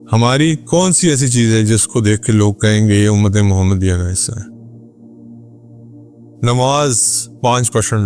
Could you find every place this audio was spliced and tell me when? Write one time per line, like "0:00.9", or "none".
0:04.4
0:05.8